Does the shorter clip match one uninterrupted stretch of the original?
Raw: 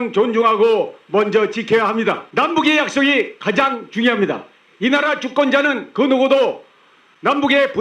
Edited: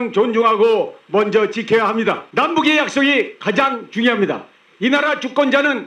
yes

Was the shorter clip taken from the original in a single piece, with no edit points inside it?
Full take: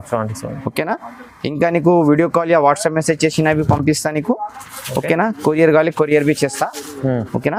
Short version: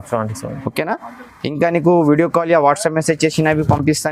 yes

